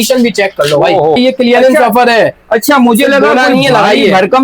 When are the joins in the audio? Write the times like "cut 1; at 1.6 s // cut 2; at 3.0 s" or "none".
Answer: cut 1; at 1.2 s